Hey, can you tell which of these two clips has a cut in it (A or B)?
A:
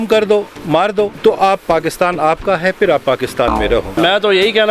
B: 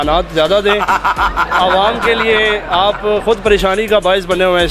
A